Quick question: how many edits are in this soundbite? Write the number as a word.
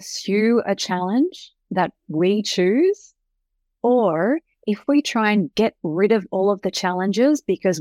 zero